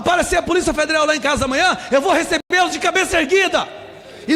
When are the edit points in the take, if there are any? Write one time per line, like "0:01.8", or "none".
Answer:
none